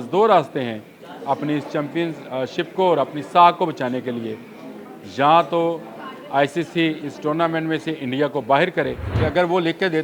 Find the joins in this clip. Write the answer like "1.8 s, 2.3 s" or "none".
9.0 s